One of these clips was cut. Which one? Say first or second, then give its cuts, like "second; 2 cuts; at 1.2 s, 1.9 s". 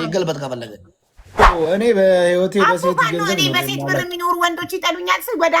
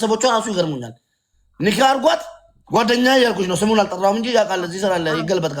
first; 1 cut; at 1.5 s